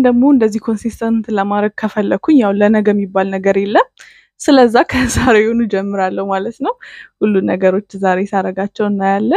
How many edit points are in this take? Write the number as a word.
zero